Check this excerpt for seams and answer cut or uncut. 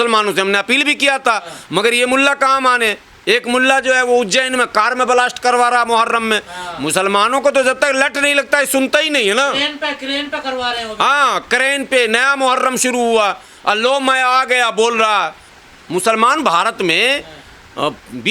cut